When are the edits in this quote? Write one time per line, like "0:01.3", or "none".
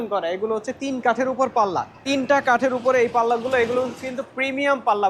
0:02.1